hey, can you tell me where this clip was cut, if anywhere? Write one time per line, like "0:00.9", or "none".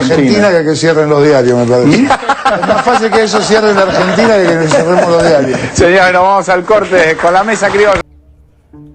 0:08.0